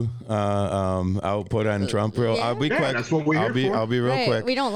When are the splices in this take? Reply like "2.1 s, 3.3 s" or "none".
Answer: none